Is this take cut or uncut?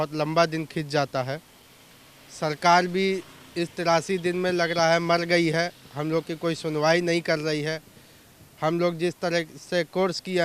uncut